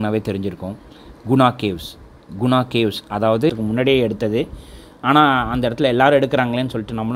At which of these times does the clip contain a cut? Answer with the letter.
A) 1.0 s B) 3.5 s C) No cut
B